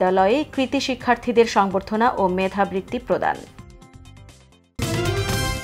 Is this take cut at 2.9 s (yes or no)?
no